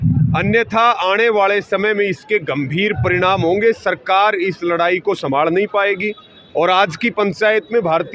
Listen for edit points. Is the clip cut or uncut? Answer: uncut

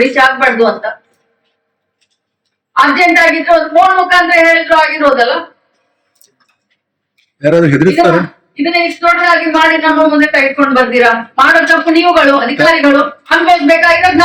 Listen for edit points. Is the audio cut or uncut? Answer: uncut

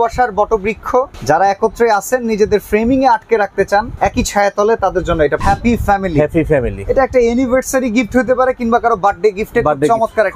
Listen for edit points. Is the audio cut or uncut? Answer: cut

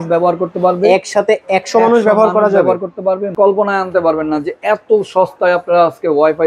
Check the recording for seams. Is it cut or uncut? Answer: cut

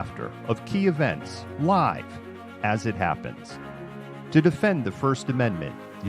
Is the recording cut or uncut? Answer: cut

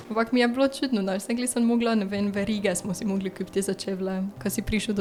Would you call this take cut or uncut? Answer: uncut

